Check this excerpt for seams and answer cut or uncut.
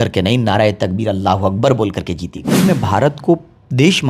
cut